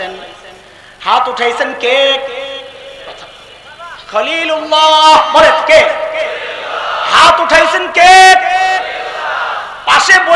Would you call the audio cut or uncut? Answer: uncut